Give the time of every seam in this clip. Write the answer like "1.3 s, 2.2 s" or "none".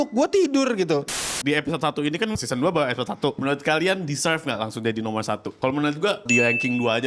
1.2 s, 2.4 s, 3.4 s, 5.5 s, 6.3 s